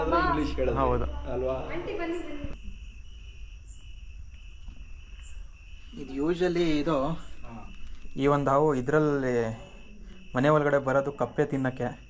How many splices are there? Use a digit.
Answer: 1